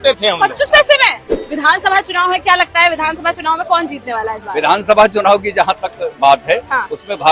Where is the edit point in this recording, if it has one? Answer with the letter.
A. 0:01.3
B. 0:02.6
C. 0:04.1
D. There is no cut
A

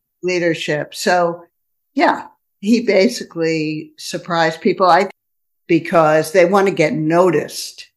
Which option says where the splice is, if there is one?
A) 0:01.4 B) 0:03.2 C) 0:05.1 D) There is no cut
C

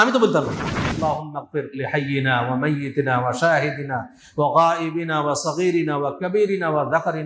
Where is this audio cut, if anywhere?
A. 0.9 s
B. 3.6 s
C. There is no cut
A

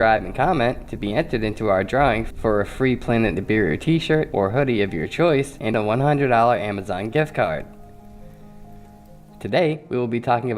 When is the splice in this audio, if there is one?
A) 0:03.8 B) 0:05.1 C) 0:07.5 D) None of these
A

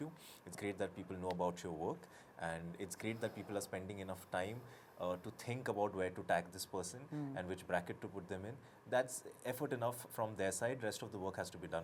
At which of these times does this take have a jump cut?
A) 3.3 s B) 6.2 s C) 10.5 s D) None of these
D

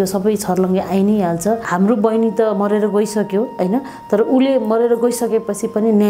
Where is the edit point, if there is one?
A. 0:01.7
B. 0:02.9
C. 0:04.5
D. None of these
A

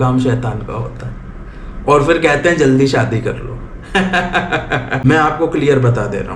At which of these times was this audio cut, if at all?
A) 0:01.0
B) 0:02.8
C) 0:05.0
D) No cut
C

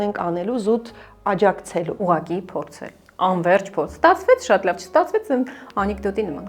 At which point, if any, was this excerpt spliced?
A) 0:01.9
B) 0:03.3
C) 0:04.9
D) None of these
A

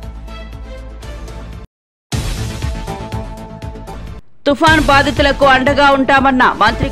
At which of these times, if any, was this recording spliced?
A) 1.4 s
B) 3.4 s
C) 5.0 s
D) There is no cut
A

